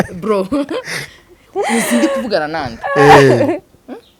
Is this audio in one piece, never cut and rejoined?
yes; 0 cuts

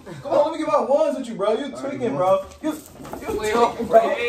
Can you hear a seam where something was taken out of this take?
no; 0 cuts

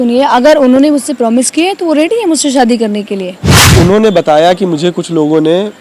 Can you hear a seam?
yes; 1 cut; at 3.6 s

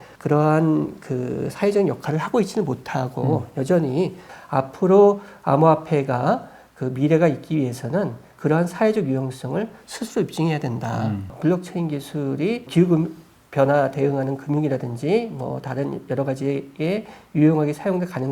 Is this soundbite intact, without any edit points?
no; 2 cuts; at 4.3 s, 11.3 s

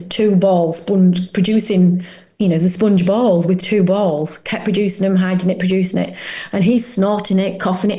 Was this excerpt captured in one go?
yes; 0 cuts

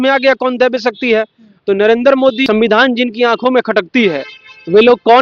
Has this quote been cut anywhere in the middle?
yes; 1 cut; at 2.4 s

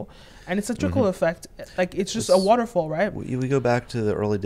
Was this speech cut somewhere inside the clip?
no; 0 cuts

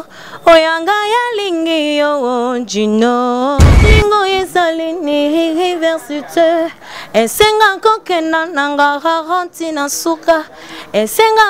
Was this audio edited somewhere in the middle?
yes; 1 cut; at 3.8 s

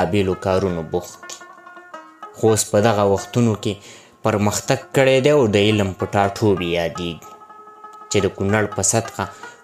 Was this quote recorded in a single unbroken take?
yes; 0 cuts

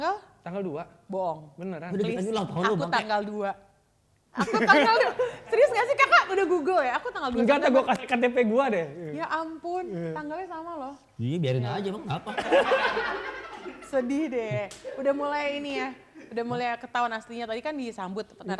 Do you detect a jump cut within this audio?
no; 0 cuts

